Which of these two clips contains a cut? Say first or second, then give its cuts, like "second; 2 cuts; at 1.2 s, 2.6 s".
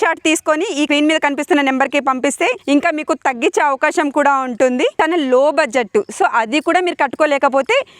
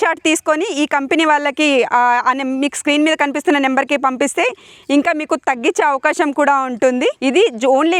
first; 3 cuts; at 0.9 s, 2.6 s, 4.9 s